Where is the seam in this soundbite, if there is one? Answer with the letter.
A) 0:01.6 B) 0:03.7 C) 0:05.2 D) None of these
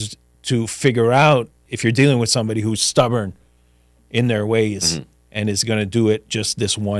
A